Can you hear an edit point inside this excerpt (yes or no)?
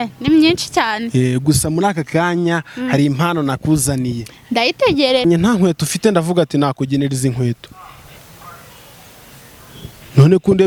no